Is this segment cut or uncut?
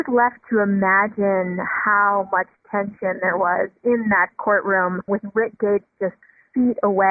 uncut